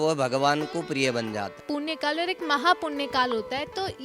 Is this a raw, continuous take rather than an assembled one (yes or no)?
no